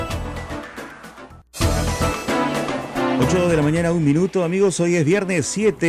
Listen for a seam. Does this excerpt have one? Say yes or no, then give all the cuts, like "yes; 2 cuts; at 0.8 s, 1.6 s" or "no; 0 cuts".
yes; 1 cut; at 1.3 s